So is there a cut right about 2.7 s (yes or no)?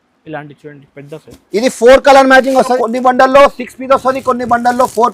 yes